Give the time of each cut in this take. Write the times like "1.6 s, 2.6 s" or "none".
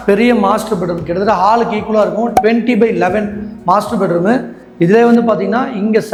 none